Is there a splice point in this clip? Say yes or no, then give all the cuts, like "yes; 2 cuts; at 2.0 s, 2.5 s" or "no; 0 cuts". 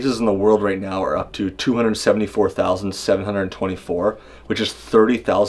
no; 0 cuts